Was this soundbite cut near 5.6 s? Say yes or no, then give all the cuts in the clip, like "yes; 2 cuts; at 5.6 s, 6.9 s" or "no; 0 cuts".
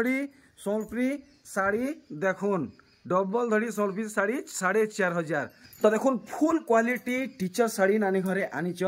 yes; 1 cut; at 5.6 s